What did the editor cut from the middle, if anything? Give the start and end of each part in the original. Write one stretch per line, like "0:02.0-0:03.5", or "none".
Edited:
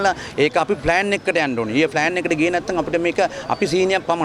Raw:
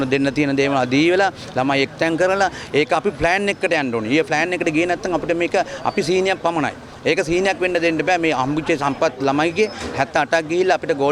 none